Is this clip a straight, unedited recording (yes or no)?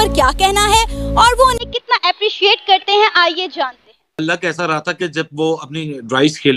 no